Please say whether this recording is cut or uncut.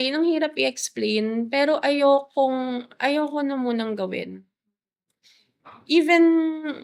uncut